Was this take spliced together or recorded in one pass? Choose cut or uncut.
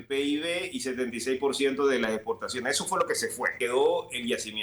cut